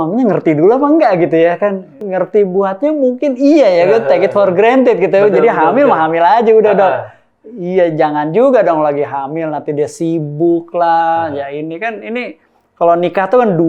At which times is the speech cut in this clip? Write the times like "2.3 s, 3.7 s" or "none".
2.0 s